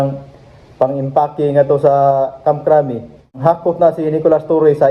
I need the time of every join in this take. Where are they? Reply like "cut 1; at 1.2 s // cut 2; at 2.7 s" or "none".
cut 1; at 3.4 s